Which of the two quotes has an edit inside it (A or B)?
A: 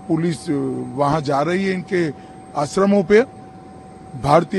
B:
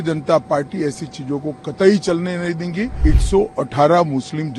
B